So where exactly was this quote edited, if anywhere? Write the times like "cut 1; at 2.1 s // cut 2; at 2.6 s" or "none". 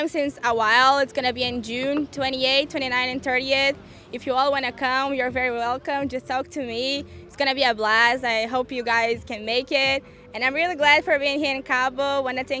none